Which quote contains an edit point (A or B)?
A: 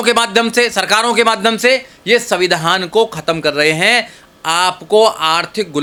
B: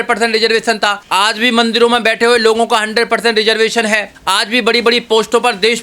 B